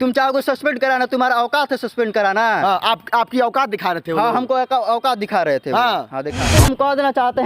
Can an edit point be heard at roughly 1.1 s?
no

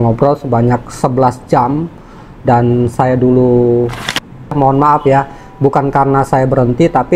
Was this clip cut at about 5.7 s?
no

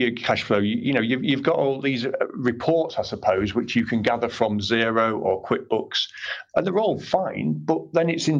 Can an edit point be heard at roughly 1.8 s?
yes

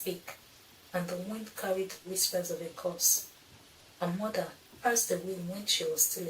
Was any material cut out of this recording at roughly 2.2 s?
no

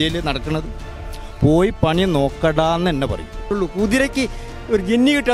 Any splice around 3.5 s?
yes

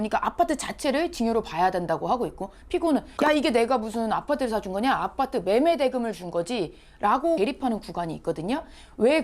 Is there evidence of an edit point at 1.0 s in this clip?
no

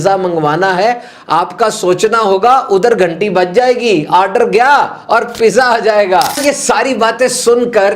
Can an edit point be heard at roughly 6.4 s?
yes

